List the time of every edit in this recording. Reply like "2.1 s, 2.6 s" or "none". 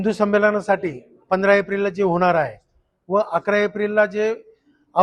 none